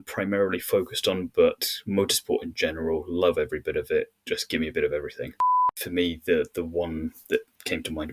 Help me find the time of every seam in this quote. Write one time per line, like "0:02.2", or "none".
0:05.7